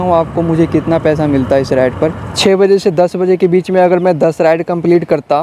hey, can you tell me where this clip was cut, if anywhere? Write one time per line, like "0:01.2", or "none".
0:02.3